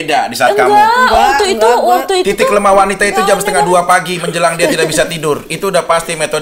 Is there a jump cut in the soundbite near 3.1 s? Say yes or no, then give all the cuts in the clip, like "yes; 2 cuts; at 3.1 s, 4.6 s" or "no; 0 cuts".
no; 0 cuts